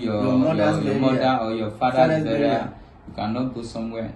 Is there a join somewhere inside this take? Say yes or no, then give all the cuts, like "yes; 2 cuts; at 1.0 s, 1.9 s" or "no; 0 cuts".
no; 0 cuts